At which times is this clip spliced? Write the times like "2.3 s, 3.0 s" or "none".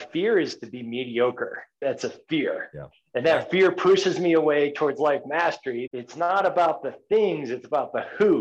1.8 s, 5.8 s